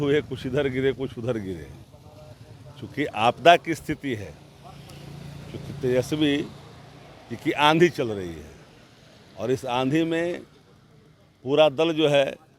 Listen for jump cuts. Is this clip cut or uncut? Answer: uncut